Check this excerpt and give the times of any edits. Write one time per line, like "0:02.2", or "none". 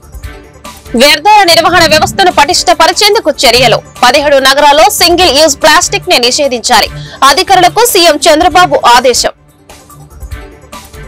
0:00.9
0:09.5